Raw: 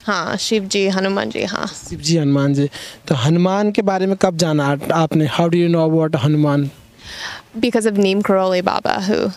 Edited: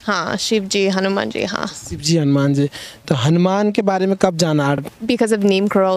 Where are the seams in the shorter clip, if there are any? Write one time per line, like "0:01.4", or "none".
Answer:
0:04.8